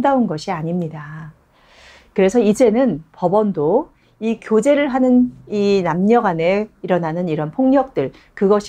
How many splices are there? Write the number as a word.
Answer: zero